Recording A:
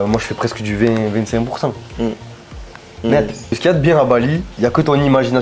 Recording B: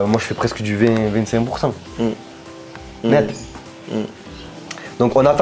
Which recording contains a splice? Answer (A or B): A